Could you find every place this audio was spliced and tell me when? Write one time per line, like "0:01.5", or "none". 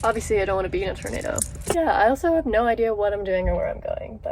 0:01.6